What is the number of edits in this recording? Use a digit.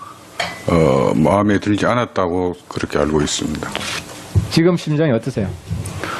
1